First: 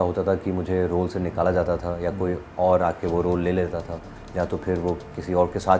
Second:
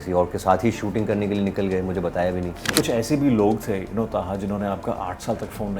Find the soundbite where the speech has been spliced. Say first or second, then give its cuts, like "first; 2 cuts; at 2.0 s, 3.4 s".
second; 1 cut; at 2.6 s